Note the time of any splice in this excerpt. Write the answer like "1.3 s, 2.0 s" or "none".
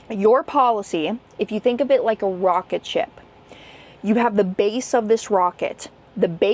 none